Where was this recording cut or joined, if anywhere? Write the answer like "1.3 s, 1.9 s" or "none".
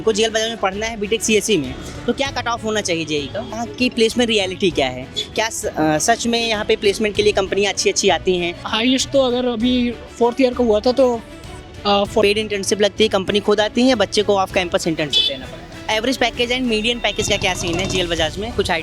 3.6 s, 8.6 s, 12.2 s, 15.9 s